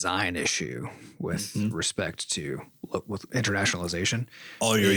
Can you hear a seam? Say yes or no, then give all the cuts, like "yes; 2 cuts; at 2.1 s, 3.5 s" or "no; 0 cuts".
no; 0 cuts